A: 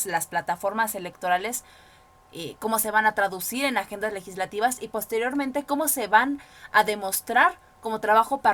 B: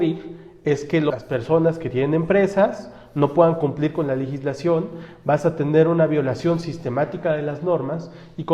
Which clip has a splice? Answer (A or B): B